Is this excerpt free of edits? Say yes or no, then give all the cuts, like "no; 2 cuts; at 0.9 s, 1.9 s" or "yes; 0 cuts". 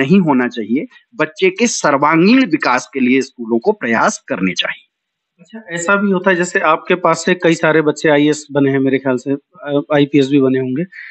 yes; 0 cuts